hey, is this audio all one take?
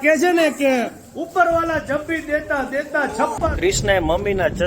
no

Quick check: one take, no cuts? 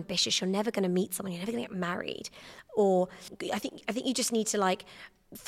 no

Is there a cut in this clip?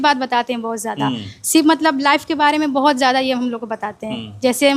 no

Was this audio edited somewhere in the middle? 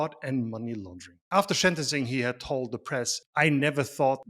yes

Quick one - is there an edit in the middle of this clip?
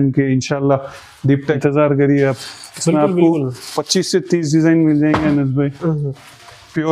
yes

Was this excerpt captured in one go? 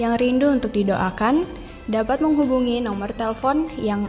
yes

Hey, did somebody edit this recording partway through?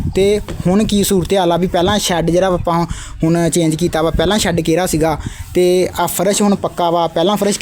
no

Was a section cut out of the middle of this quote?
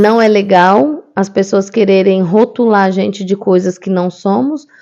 no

